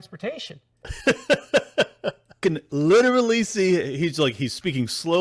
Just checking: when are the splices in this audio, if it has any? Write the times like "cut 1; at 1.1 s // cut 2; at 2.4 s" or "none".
cut 1; at 2.4 s